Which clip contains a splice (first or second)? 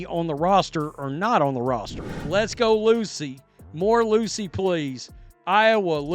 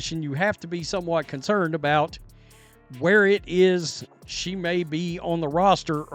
first